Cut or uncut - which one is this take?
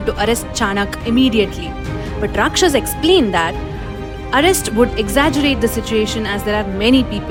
uncut